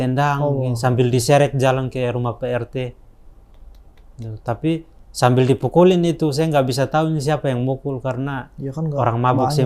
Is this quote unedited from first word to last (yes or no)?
yes